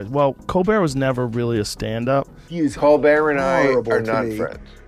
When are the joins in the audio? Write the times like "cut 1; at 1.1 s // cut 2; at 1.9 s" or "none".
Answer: cut 1; at 2.4 s

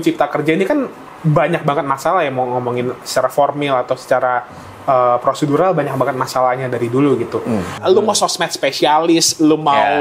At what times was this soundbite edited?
cut 1; at 7.8 s

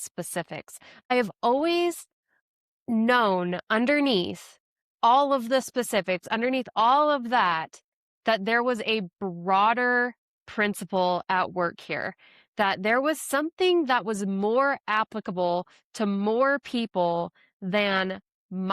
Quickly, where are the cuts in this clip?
cut 1; at 1.1 s

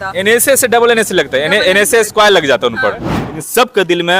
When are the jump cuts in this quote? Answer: cut 1; at 3.2 s

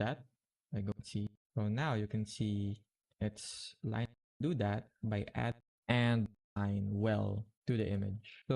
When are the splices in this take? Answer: cut 1; at 1.3 s // cut 2; at 4.4 s // cut 3; at 5.6 s // cut 4; at 6.6 s

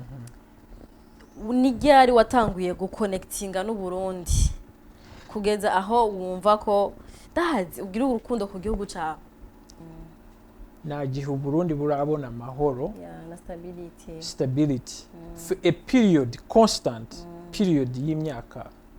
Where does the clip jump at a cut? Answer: cut 1; at 9.8 s

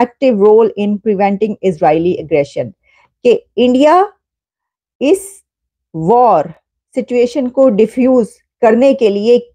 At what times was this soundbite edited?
none

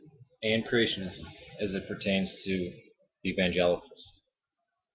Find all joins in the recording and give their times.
none

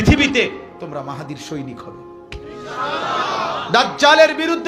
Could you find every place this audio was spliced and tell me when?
none

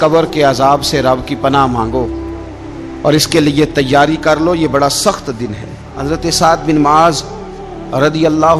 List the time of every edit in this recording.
cut 1; at 5.9 s

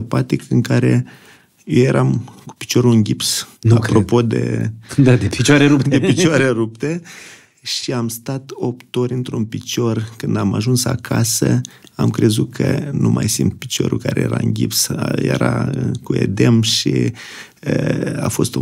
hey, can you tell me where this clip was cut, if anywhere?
none

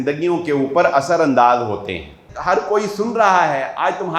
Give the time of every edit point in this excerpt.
cut 1; at 2.3 s

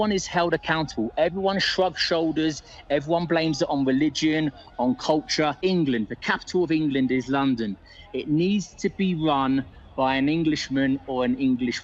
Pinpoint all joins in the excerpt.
cut 1; at 5.5 s

